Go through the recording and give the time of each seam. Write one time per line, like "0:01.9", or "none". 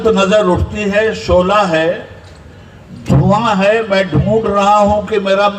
none